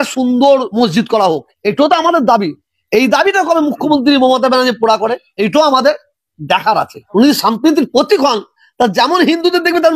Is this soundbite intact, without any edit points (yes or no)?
yes